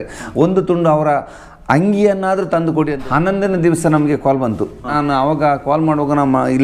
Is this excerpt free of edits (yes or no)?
no